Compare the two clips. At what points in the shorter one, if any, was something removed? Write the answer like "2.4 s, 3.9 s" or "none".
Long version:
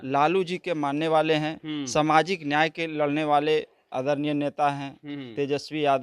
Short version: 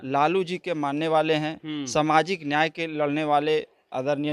none